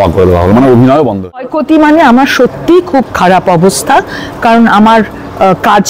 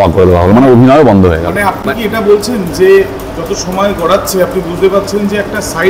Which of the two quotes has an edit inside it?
first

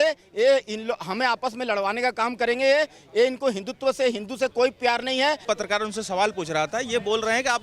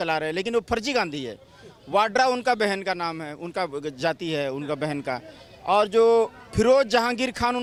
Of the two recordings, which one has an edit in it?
first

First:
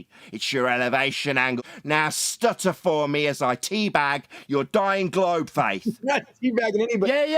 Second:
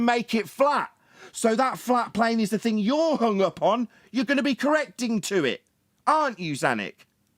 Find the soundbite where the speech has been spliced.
first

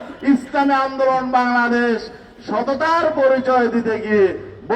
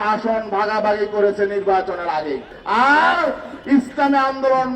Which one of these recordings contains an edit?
second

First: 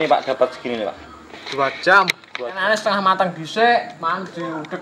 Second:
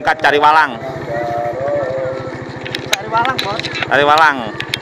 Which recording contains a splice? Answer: first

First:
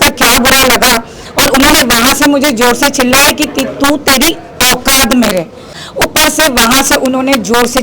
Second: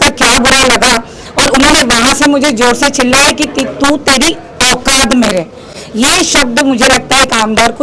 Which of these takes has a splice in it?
first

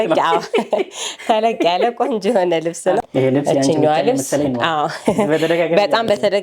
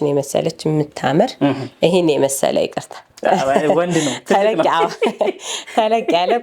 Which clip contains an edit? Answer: first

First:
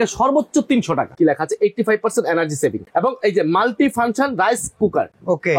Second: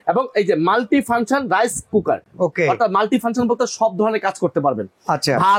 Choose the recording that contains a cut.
first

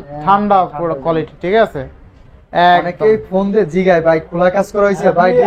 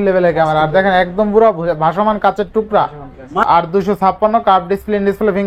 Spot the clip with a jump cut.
second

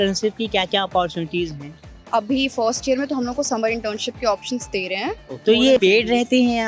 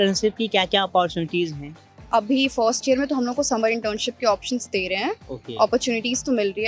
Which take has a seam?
first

